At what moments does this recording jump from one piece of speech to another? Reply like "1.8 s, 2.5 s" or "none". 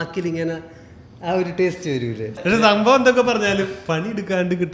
2.3 s